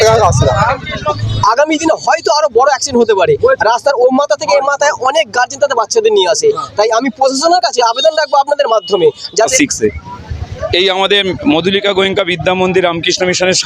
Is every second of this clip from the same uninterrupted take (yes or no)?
no